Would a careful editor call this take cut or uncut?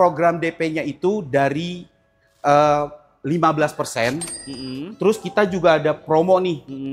uncut